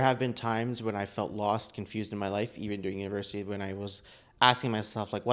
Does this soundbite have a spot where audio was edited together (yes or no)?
no